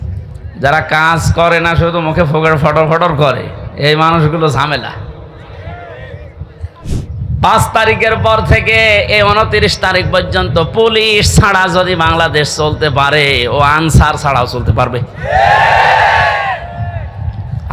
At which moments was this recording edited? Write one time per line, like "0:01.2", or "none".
0:06.9